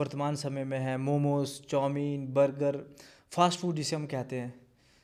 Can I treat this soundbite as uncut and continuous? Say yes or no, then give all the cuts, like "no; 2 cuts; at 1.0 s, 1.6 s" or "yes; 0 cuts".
yes; 0 cuts